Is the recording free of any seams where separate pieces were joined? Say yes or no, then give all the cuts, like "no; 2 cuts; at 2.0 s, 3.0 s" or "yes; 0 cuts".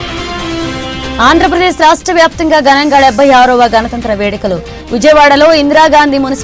no; 1 cut; at 1.0 s